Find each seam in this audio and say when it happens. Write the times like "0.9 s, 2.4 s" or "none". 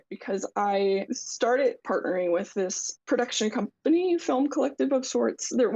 1.2 s